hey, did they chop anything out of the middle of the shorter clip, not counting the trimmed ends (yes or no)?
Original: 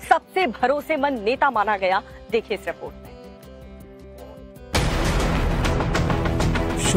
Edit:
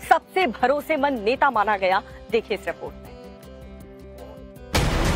no